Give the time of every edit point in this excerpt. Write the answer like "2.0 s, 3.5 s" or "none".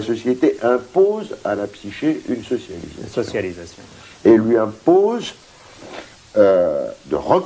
2.3 s